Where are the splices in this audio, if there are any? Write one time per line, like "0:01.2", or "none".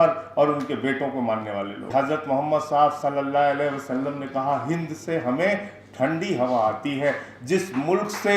0:01.8